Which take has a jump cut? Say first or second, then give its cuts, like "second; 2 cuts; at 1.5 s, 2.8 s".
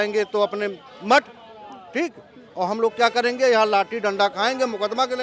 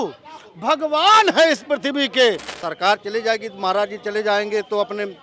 second; 1 cut; at 2.5 s